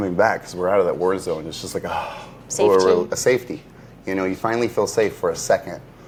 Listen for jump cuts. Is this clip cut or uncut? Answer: uncut